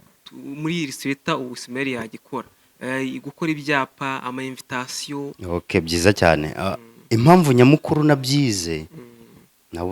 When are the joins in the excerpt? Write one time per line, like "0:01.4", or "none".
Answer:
0:05.4